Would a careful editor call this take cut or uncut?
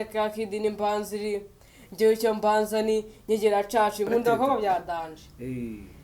cut